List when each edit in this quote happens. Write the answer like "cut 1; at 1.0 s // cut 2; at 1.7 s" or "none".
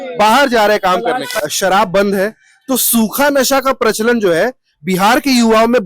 cut 1; at 1.3 s